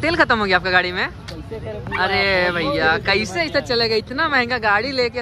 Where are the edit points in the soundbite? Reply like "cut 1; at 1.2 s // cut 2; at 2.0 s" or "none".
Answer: none